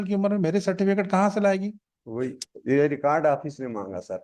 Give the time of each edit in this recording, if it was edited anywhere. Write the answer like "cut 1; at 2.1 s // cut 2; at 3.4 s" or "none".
none

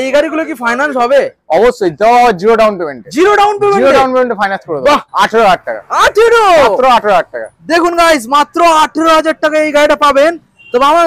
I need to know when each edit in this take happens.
cut 1; at 5.1 s

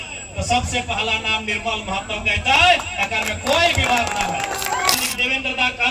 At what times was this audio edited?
cut 1; at 4.9 s

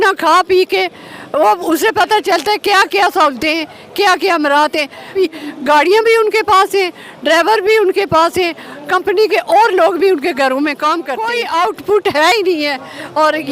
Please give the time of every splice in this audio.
cut 1; at 5.1 s // cut 2; at 11.2 s

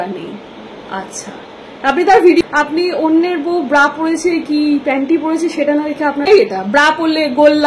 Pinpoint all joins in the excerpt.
cut 1; at 2.4 s // cut 2; at 6.3 s

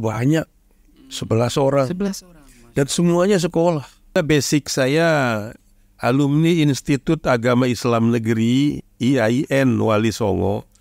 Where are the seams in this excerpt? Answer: cut 1; at 4.2 s

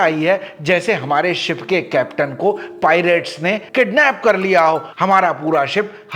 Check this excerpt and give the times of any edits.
none

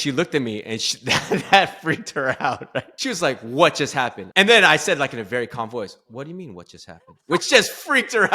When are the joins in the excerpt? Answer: cut 1; at 2.9 s // cut 2; at 4.2 s

